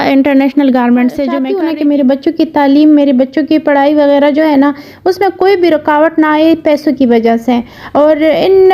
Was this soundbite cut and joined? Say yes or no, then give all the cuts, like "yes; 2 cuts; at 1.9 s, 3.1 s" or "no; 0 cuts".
yes; 1 cut; at 1.4 s